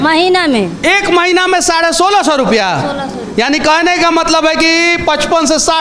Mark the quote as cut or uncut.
uncut